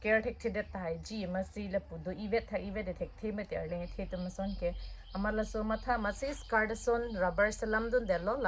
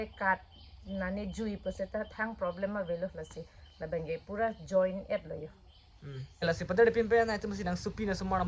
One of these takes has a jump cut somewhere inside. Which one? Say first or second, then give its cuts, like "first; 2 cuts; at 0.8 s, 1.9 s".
second; 1 cut; at 6.4 s